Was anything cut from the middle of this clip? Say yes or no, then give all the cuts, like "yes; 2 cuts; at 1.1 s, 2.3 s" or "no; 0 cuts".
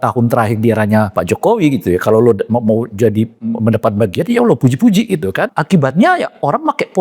yes; 2 cuts; at 1.1 s, 5.6 s